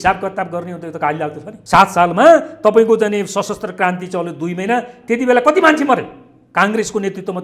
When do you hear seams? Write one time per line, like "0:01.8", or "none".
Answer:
0:01.5